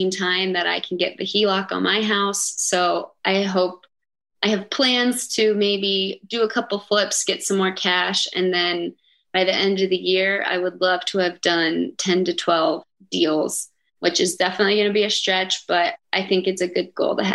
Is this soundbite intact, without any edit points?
no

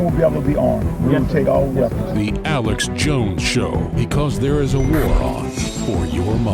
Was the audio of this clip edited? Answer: yes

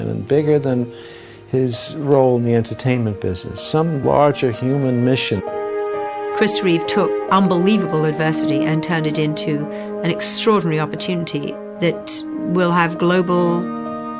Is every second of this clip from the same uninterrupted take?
no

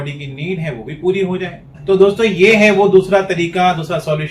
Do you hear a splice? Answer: yes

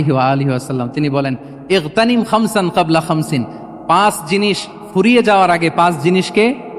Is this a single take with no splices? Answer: yes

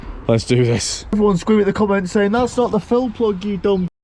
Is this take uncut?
no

